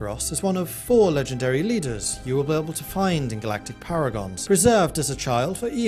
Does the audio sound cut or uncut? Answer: uncut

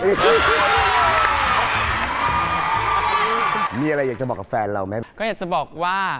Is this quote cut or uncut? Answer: cut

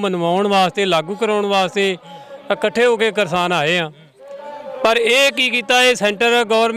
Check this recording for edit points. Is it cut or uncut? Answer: uncut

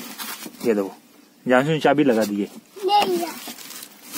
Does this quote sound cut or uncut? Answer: uncut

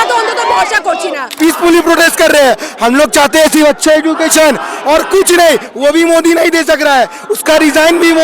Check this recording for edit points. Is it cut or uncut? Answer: cut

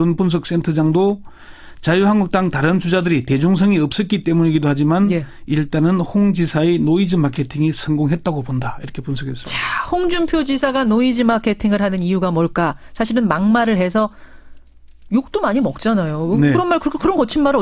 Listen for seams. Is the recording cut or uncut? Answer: uncut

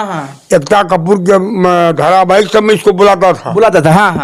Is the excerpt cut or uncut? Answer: uncut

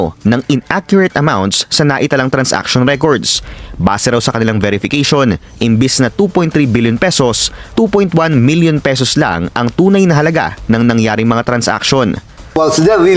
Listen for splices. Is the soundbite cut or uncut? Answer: uncut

